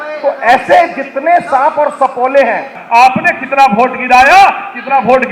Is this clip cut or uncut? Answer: cut